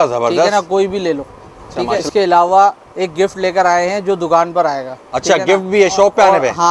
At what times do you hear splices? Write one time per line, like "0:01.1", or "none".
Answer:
0:02.0